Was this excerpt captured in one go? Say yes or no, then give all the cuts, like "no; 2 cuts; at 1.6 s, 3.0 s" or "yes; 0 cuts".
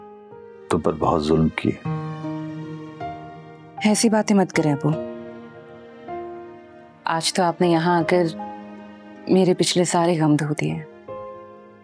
yes; 0 cuts